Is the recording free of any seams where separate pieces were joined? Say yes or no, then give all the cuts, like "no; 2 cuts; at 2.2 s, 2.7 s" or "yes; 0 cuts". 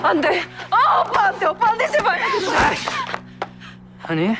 yes; 0 cuts